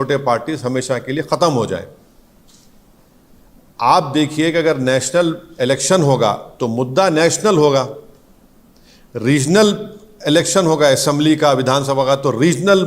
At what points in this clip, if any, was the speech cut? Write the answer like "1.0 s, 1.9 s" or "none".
none